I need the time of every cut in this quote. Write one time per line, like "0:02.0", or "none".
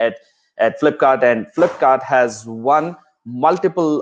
none